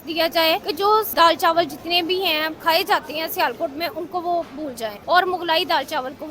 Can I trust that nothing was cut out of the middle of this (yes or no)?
no